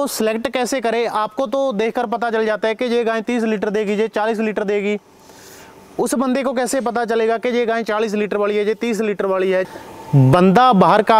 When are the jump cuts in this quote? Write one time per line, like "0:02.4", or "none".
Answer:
0:09.7